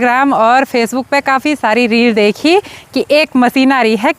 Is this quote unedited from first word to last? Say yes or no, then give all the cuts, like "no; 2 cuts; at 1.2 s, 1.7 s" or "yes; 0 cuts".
yes; 0 cuts